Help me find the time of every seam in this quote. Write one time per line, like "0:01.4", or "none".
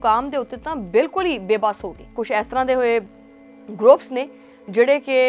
0:02.2

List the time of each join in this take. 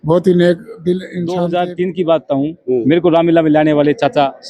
0:01.2

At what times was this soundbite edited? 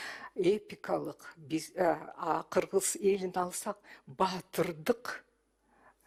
none

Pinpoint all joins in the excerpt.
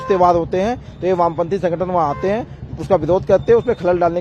none

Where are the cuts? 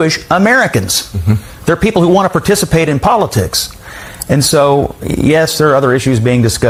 none

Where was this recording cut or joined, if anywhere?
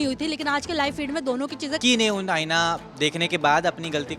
0:01.8

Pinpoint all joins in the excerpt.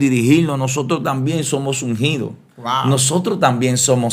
none

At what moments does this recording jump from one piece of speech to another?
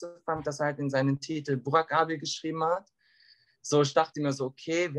none

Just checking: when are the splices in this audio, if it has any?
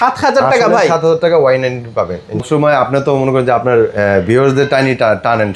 0:02.4

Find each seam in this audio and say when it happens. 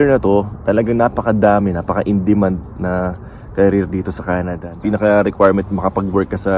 0:04.6

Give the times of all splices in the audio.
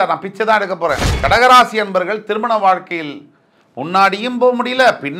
0:01.1

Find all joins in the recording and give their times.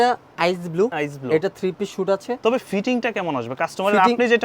0:00.9
0:02.4

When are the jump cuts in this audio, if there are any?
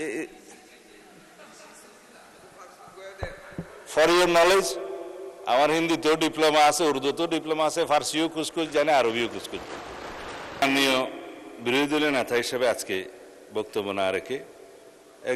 0:10.6

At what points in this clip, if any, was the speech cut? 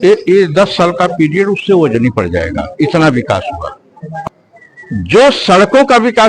0:04.3

